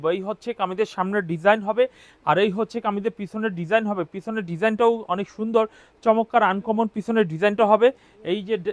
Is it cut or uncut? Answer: uncut